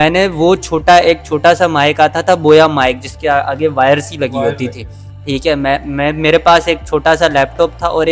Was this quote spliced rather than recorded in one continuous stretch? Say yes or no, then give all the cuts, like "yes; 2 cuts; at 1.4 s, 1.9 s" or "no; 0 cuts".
no; 0 cuts